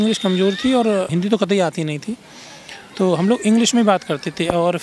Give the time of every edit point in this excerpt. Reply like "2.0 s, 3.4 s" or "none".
1.1 s